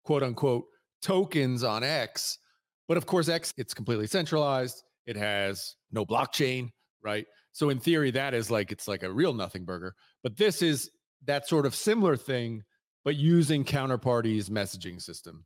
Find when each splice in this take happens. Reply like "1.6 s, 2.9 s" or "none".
3.4 s, 5.7 s